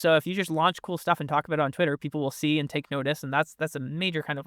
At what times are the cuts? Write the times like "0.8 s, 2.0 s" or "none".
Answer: none